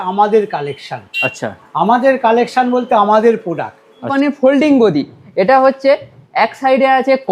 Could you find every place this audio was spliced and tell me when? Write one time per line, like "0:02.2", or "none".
0:04.1